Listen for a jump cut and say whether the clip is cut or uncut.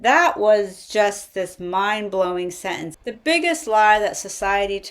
cut